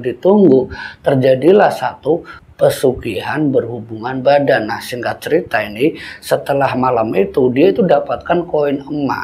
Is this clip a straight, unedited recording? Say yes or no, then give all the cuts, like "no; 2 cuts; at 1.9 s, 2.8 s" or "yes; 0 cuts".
yes; 0 cuts